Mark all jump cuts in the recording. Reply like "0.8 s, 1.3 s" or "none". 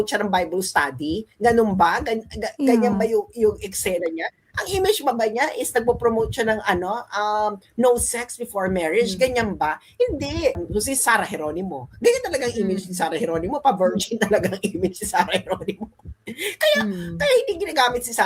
10.6 s